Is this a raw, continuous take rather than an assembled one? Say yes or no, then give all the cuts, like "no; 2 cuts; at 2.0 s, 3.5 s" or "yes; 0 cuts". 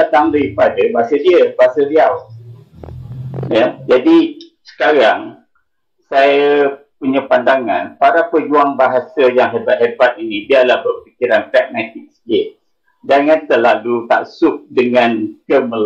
yes; 0 cuts